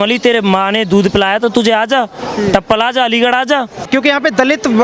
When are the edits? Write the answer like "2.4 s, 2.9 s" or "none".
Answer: 3.9 s